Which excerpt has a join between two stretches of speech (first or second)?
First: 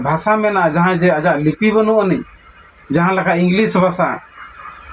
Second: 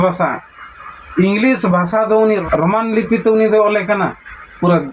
second